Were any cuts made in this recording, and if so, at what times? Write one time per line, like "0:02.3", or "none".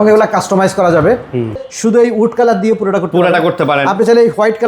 0:01.6